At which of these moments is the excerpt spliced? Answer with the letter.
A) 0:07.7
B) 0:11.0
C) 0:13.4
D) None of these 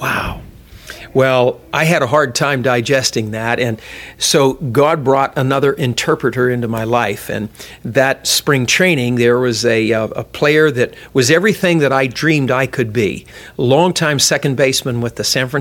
C